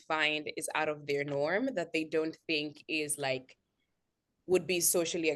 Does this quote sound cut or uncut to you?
uncut